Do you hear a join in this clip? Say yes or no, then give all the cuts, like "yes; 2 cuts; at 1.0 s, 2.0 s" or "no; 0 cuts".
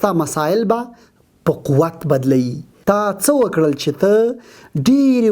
yes; 1 cut; at 2.7 s